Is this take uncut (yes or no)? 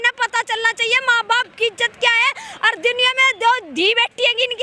yes